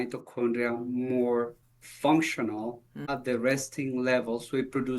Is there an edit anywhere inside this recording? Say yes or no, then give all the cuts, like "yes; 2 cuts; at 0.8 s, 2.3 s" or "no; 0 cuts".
yes; 1 cut; at 3.0 s